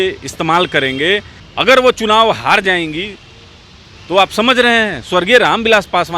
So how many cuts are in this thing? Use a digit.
1